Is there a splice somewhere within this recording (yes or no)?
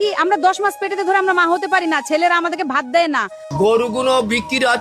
yes